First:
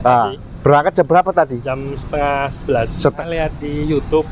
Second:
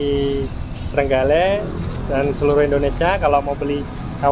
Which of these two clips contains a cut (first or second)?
first